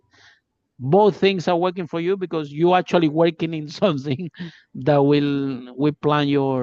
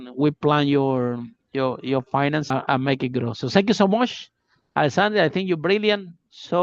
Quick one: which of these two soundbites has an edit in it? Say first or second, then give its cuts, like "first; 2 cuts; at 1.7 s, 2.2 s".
second; 1 cut; at 2.5 s